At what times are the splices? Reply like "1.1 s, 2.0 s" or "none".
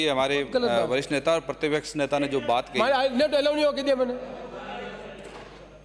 none